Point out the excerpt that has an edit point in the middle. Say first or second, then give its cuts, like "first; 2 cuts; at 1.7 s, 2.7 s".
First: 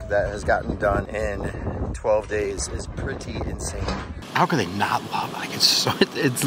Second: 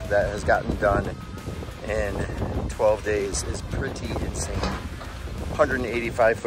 first; 2 cuts; at 1.1 s, 4.2 s